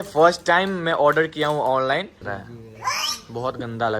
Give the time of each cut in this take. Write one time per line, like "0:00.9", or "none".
0:02.2